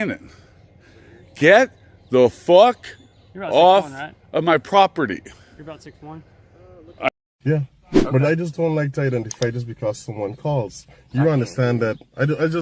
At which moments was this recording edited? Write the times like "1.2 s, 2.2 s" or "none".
7.1 s